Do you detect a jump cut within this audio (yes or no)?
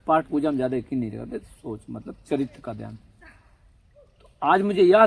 no